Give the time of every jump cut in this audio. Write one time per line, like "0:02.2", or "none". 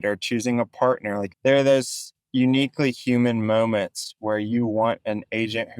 0:01.3

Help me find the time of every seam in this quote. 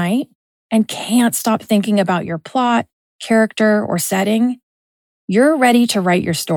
none

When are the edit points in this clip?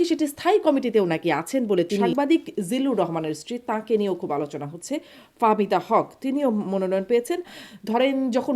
0:02.1
0:07.6

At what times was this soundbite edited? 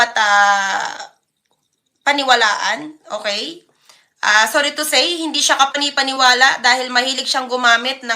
0:04.8

